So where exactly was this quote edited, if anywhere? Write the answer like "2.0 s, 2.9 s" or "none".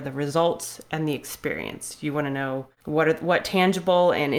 2.7 s

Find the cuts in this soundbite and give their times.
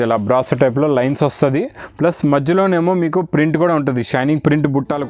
none

